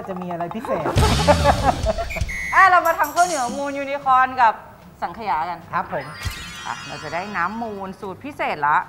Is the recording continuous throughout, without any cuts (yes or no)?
no